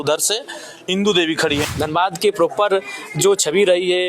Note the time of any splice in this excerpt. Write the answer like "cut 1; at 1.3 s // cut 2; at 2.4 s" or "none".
cut 1; at 1.7 s